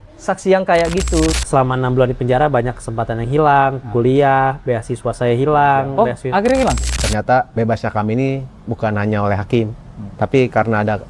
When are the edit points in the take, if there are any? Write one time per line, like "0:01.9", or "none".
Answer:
0:01.4
0:07.0